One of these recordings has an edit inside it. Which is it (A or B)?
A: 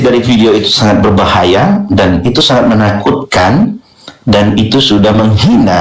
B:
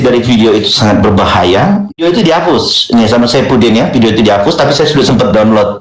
B